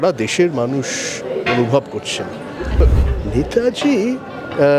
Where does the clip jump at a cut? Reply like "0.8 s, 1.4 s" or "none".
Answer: 2.8 s